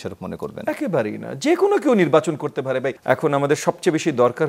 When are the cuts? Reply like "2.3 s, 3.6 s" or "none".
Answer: 2.9 s